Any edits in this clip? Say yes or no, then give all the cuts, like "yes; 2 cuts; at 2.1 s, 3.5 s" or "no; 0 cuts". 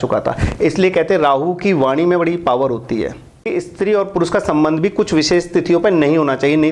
yes; 1 cut; at 3.5 s